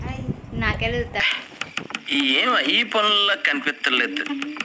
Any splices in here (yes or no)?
yes